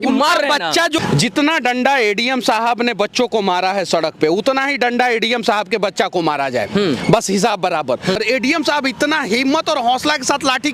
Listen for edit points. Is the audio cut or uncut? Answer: cut